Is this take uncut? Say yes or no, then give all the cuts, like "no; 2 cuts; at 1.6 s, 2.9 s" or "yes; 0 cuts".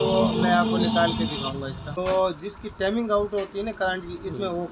no; 1 cut; at 2.0 s